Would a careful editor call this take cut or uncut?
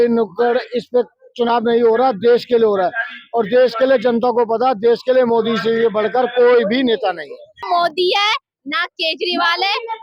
cut